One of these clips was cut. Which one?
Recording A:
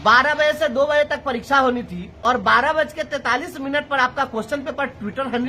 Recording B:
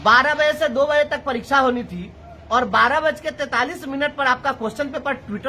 A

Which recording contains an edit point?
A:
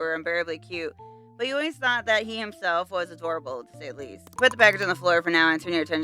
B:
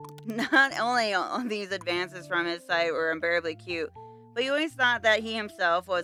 A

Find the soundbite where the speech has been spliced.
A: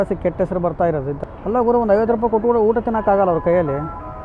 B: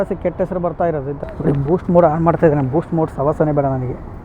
B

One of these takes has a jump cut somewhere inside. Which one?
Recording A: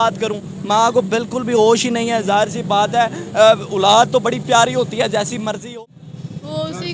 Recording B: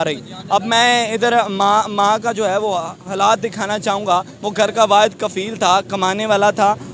A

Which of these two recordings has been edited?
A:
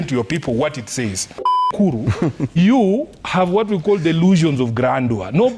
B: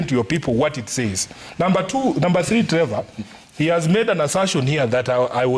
A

